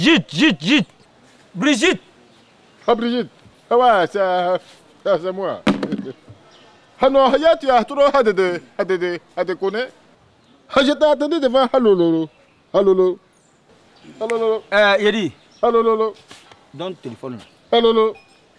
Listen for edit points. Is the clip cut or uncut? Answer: uncut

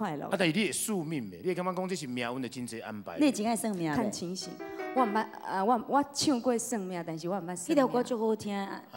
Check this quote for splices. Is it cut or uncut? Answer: uncut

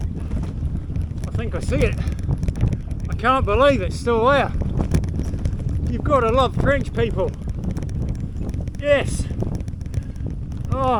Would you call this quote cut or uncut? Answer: uncut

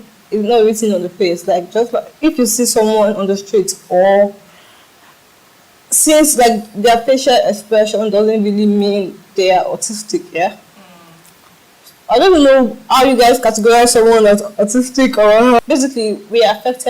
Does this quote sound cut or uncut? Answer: cut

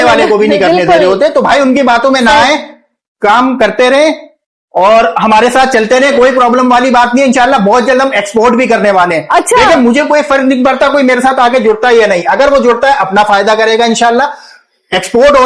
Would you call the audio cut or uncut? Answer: uncut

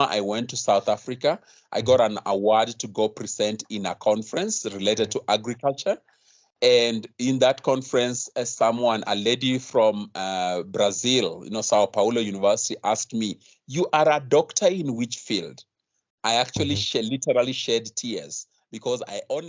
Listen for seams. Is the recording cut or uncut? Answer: uncut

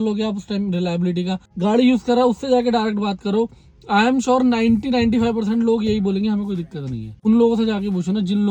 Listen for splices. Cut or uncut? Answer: cut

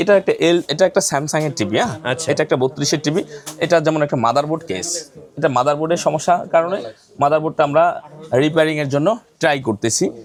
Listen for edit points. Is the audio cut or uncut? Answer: uncut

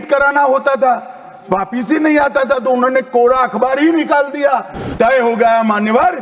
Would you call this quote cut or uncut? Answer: cut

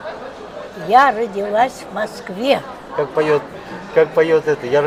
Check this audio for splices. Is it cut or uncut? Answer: uncut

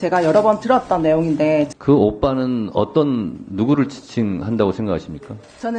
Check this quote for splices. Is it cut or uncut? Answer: cut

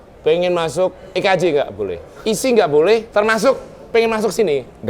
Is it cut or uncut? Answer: cut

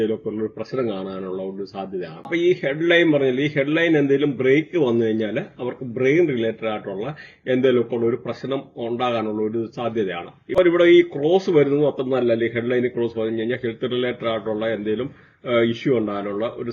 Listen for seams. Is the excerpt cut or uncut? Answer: uncut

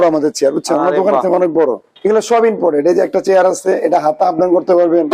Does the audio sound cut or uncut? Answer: cut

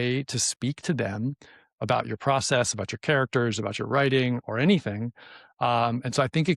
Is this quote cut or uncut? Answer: uncut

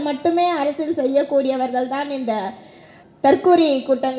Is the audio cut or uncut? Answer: cut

